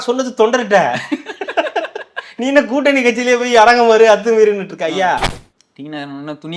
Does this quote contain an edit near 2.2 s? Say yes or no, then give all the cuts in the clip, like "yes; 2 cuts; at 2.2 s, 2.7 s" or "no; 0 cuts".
no; 1 cut; at 5.4 s